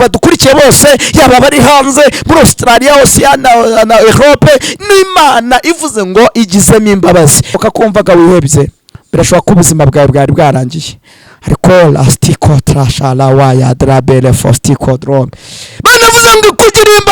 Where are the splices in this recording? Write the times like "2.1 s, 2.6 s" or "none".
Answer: 7.6 s